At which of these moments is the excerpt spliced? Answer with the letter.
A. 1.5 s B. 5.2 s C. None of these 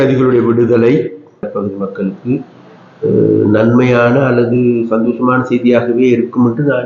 A